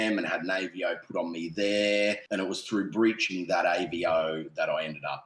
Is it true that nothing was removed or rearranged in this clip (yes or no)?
no